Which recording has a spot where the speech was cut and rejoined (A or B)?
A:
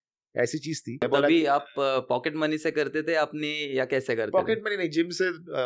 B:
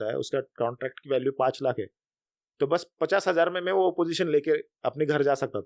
A